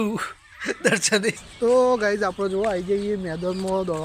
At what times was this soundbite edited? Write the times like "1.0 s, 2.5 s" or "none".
1.3 s